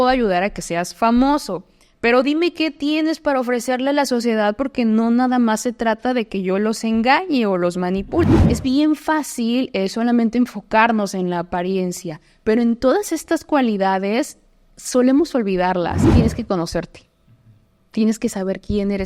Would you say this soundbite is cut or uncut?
cut